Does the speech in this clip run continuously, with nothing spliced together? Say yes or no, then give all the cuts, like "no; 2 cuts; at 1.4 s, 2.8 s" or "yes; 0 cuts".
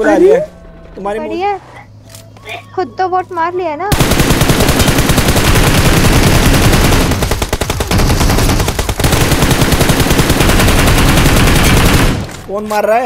no; 1 cut; at 1.2 s